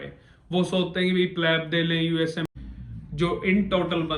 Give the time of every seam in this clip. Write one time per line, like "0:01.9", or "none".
0:02.5